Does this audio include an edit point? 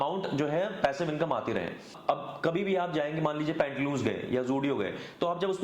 yes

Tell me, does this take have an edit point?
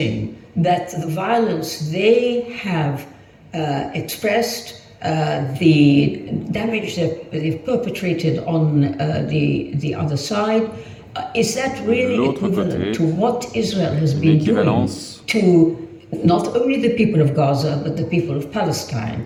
no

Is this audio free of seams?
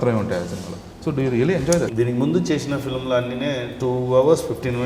no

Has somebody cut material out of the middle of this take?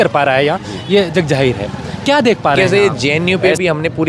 yes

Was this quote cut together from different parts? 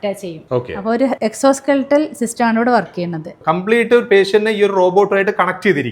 no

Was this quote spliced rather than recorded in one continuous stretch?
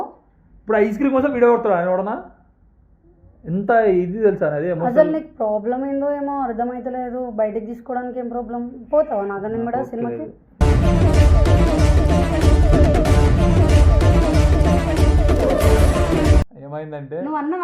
yes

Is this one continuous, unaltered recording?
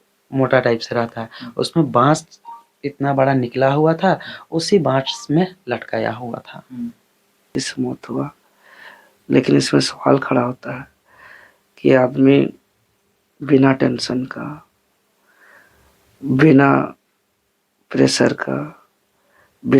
no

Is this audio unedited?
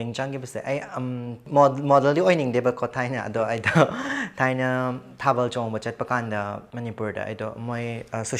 no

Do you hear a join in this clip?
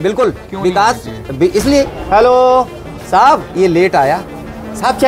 yes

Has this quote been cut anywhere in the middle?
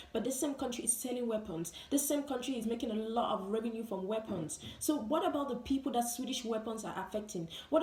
no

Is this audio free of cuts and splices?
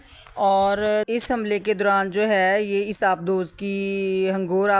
yes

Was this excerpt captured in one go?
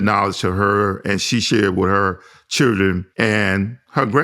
no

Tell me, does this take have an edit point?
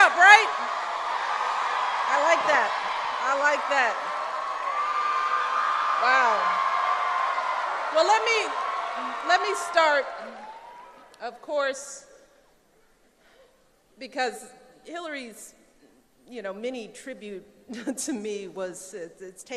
yes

